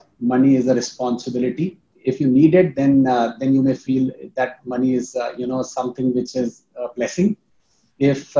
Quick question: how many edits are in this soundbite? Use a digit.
1